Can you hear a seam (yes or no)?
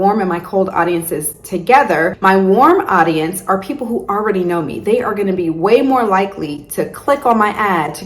yes